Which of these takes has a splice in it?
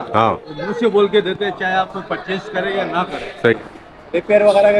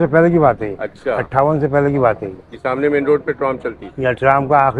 first; 1 cut; at 3.6 s

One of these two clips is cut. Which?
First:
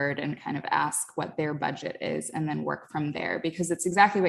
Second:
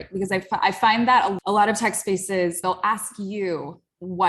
second; 2 cuts; at 1.3 s, 2.6 s

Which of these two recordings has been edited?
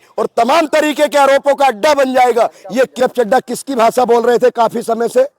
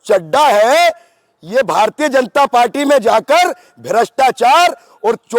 first; 1 cut; at 3.0 s

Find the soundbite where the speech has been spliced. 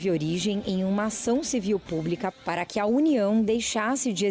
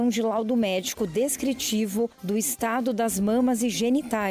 first; 1 cut; at 2.3 s

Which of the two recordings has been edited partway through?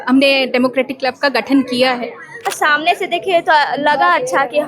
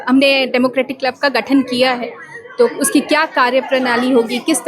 first; 1 cut; at 2.5 s

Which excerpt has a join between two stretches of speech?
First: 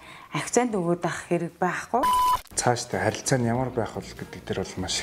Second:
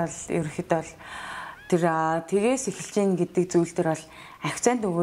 first; 1 cut; at 2.1 s

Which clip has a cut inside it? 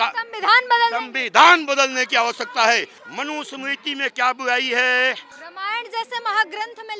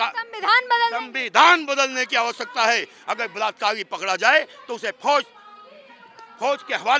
first; 2 cuts; at 2.9 s, 5.4 s

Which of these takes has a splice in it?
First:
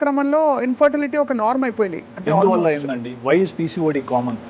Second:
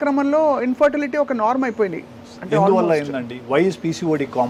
first; 1 cut; at 2.1 s

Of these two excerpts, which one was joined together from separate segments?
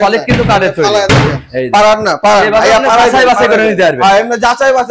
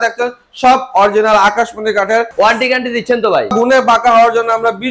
second; 2 cuts; at 2.3 s, 3.5 s

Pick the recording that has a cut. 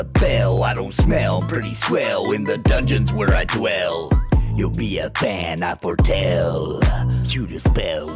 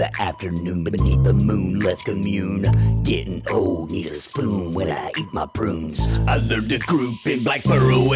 second; 1 cut; at 6.3 s

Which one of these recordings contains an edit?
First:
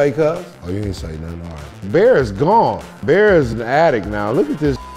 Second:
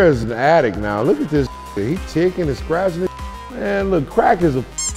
first; 1 cut; at 1.8 s

